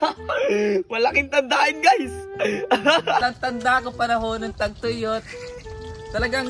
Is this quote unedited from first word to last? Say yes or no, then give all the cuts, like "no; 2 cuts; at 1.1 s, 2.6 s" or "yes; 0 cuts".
no; 1 cut; at 3.2 s